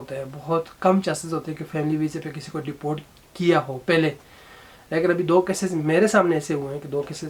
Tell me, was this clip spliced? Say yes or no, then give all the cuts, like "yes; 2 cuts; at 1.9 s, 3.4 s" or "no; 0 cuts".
no; 0 cuts